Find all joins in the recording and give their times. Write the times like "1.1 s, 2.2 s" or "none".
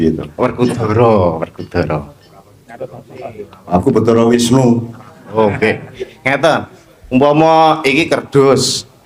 none